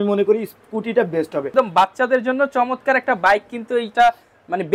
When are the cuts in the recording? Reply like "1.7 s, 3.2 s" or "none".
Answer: 1.5 s